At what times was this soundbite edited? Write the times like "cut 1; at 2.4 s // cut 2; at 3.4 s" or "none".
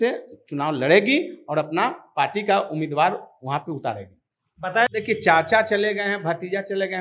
cut 1; at 4.9 s